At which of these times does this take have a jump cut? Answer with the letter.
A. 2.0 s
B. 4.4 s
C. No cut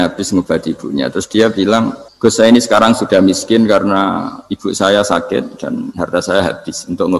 A